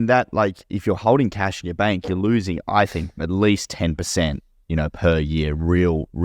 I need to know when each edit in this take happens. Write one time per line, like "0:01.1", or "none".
none